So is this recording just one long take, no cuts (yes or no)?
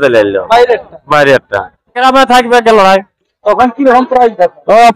no